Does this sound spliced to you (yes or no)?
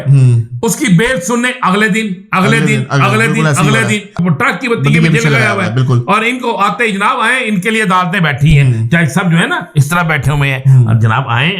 yes